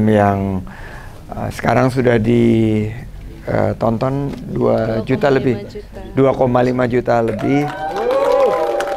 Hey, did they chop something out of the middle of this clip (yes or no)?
no